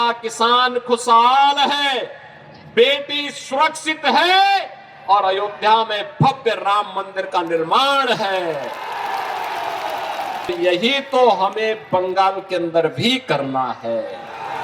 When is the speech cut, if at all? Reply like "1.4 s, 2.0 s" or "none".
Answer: 10.5 s